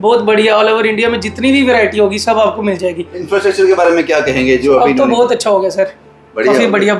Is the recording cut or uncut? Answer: uncut